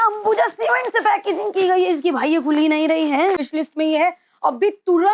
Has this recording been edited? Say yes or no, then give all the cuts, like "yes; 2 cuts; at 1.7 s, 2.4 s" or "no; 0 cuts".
yes; 1 cut; at 3.5 s